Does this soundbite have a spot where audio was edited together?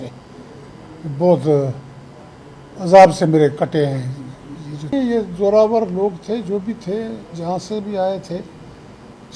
yes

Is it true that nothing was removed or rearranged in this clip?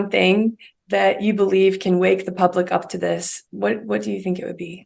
yes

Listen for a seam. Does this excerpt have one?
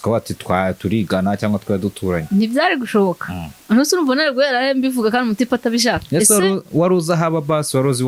no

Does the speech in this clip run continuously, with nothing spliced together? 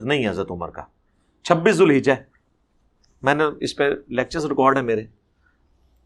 yes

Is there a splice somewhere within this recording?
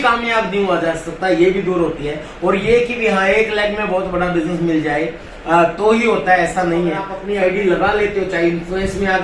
yes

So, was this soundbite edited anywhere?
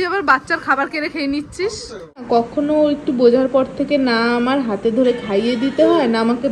yes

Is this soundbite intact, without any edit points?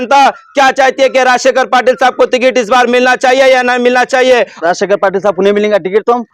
no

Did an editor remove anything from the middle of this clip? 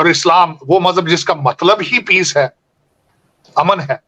no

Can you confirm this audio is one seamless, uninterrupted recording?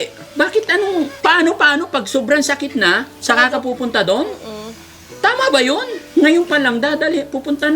no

